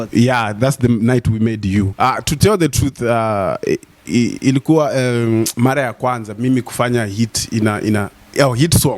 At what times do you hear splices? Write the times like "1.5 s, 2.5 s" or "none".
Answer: 1.9 s

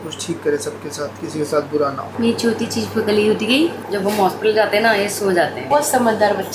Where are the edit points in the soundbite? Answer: 3.8 s, 5.6 s

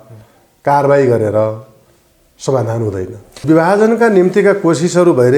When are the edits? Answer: 3.4 s

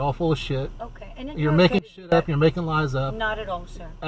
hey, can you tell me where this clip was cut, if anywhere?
none

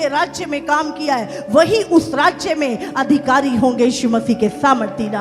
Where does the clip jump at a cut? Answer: none

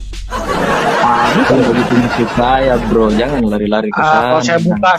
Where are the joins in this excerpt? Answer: none

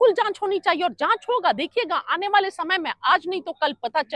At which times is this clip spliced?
none

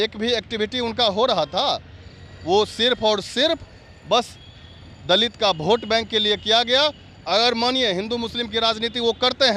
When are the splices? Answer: none

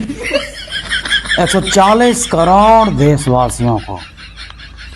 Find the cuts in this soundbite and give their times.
4.0 s

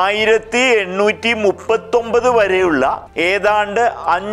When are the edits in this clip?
3.1 s

